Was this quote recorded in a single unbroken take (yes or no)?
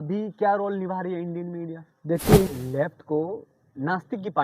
no